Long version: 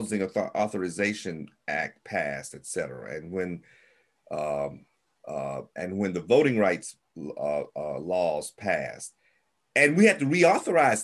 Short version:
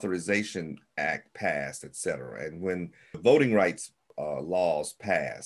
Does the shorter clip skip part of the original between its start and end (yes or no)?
yes